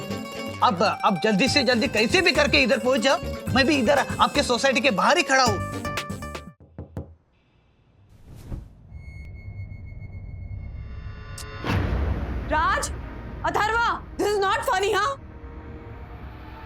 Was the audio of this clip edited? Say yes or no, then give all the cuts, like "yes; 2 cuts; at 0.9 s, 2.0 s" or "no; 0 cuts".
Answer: yes; 1 cut; at 6.2 s